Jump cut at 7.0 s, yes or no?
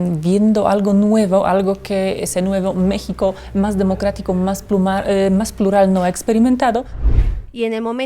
yes